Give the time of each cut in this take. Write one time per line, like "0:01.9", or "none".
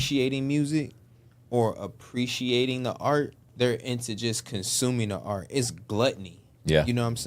0:03.4